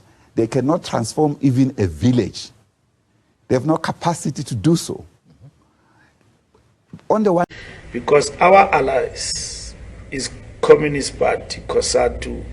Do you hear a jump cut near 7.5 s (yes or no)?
yes